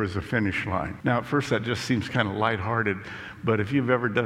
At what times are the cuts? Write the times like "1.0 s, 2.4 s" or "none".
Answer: 0.9 s